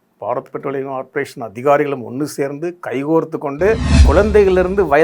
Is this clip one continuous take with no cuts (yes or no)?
no